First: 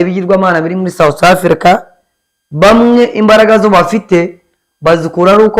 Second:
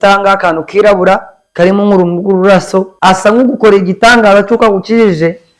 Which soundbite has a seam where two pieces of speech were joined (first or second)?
second